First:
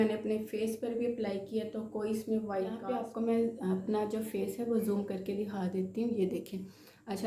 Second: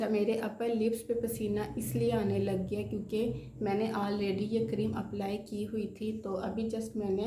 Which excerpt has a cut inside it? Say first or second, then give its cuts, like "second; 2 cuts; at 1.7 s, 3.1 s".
first; 1 cut; at 2.8 s